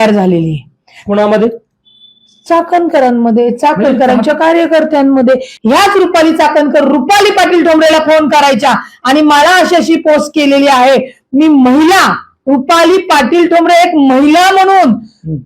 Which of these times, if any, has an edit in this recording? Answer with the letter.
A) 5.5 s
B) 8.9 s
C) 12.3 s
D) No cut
A